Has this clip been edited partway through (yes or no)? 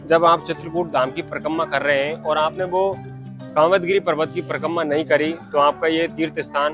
no